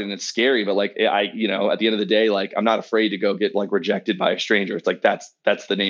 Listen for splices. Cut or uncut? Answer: uncut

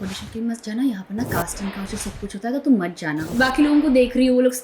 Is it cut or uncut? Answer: cut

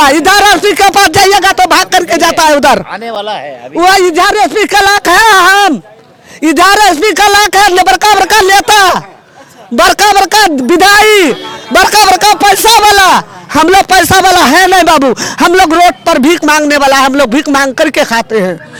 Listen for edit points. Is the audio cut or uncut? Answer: uncut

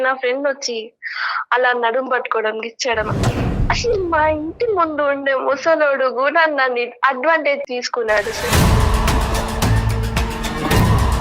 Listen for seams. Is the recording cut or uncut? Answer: cut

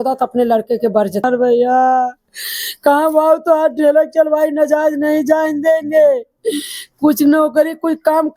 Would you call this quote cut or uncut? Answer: cut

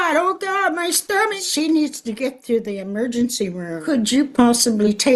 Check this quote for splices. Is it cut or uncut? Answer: cut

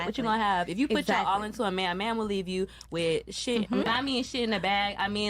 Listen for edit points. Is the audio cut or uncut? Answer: cut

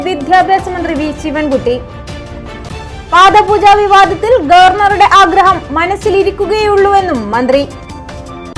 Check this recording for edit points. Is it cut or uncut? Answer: uncut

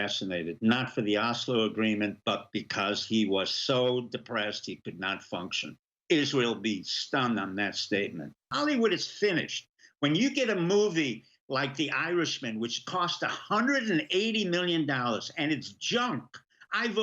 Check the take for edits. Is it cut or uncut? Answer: cut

